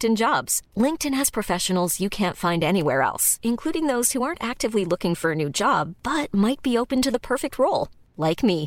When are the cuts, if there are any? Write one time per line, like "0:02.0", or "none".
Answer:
none